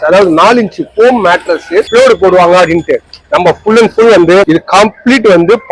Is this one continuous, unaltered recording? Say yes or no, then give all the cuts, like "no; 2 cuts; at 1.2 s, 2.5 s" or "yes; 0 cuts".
no; 2 cuts; at 1.9 s, 4.5 s